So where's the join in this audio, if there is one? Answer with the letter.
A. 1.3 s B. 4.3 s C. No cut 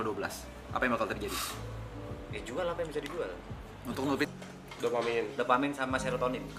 B